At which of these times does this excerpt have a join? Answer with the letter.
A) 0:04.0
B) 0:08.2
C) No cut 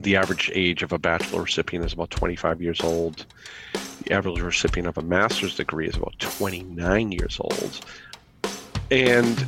B